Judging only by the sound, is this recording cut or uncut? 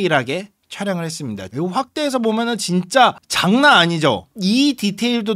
cut